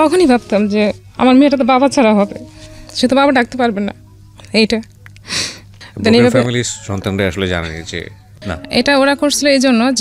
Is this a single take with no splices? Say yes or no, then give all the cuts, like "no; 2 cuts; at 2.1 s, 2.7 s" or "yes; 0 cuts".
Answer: no; 1 cut; at 8.5 s